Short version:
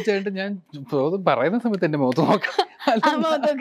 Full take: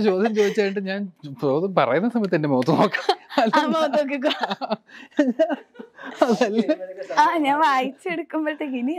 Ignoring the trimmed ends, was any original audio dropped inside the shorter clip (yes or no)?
no